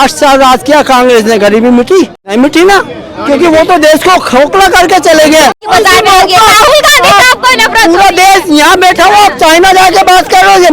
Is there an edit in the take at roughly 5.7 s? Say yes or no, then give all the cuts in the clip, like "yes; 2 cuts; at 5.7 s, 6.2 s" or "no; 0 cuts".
yes; 2 cuts; at 2.2 s, 5.7 s